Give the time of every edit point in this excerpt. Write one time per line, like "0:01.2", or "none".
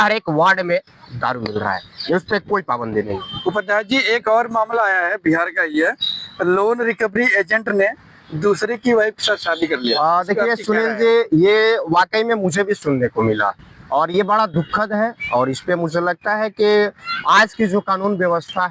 none